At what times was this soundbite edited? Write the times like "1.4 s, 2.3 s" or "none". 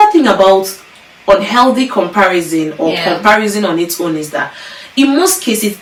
none